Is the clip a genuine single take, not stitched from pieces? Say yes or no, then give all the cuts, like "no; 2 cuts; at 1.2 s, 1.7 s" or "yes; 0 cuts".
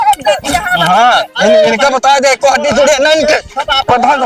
yes; 0 cuts